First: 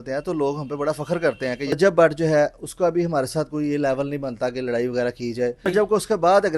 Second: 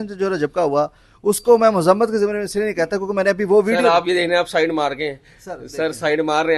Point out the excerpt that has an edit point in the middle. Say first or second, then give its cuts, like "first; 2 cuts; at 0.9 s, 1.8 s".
first; 2 cuts; at 1.7 s, 5.7 s